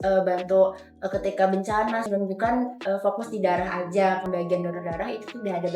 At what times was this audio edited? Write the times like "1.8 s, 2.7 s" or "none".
2.1 s, 4.2 s